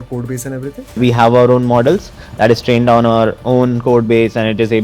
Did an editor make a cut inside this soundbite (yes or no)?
yes